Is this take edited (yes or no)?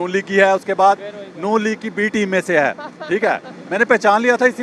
no